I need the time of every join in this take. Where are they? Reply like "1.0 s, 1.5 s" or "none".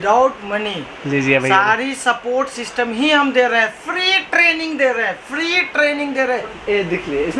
6.5 s